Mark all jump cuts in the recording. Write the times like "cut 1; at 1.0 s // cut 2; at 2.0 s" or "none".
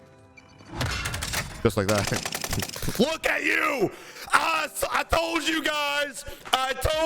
cut 1; at 2.9 s